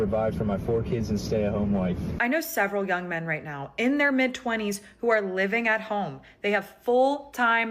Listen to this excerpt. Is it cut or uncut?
cut